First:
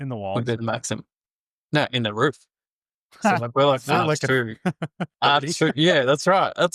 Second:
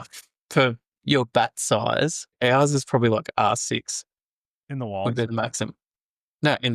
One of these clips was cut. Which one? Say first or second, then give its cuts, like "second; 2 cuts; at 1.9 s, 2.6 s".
second; 1 cut; at 2.3 s